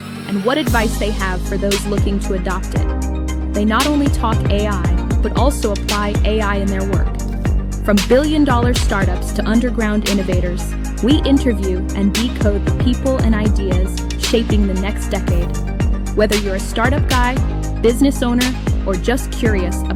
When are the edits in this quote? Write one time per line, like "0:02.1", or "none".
none